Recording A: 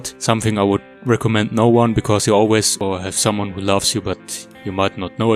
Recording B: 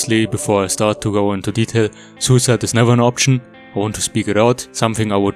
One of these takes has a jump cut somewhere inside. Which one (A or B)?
A